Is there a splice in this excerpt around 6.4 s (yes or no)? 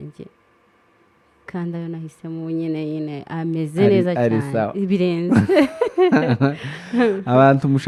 no